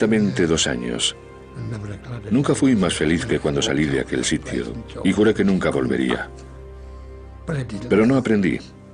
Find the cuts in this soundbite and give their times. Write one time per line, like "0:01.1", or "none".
none